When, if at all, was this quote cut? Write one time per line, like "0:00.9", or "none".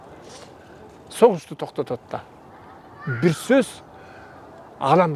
none